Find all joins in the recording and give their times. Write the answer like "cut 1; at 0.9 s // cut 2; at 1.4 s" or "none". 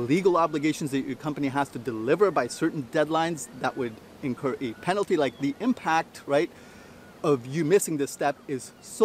none